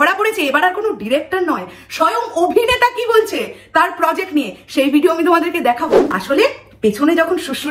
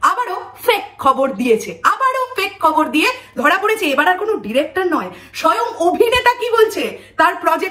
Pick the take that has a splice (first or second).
first